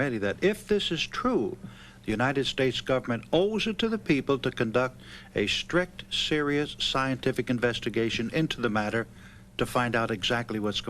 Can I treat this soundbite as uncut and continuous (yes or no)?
yes